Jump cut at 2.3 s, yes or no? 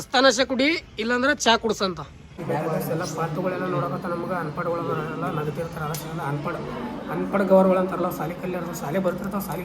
yes